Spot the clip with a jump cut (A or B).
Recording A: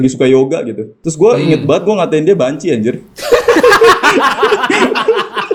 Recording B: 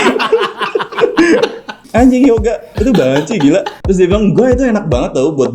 B